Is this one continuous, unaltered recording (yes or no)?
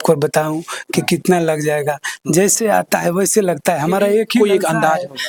yes